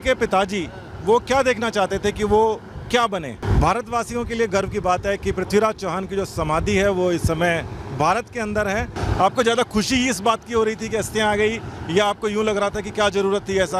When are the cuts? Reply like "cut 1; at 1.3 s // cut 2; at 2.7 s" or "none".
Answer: cut 1; at 3.4 s // cut 2; at 8.9 s